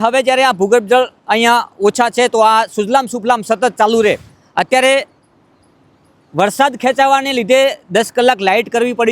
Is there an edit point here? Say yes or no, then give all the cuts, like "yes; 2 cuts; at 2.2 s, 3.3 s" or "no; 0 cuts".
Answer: yes; 1 cut; at 4.4 s